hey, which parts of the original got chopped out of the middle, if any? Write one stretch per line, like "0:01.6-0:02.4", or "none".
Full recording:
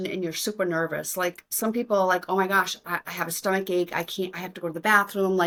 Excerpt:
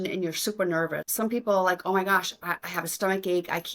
0:01.0-0:01.5